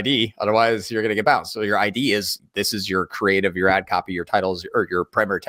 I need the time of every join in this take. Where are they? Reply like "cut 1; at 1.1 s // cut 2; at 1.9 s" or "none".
none